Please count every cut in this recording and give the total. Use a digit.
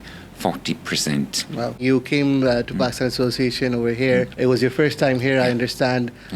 2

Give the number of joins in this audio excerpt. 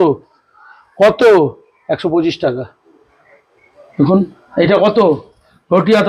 0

